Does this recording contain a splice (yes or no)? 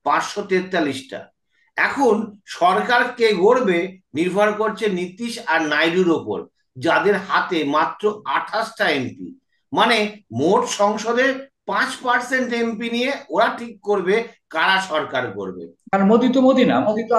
yes